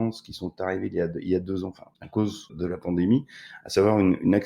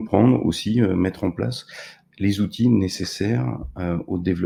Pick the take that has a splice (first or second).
first